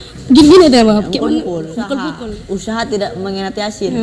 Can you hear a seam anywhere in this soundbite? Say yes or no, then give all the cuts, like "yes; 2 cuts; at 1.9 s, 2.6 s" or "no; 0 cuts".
yes; 1 cut; at 2.0 s